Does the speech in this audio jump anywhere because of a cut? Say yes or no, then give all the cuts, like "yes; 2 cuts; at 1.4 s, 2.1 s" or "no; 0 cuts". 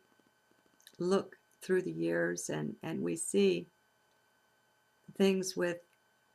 no; 0 cuts